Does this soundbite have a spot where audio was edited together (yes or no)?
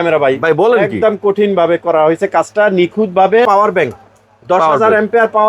yes